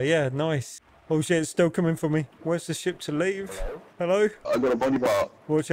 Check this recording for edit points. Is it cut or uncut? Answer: uncut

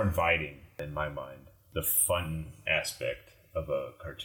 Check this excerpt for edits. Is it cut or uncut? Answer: uncut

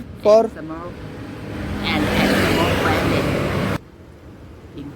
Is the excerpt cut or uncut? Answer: cut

